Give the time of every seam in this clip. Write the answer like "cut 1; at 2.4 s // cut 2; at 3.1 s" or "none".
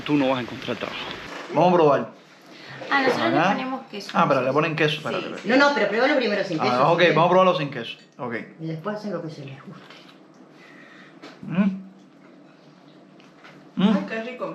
cut 1; at 1.2 s